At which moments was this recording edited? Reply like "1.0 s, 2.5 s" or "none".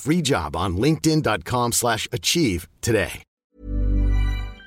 3.4 s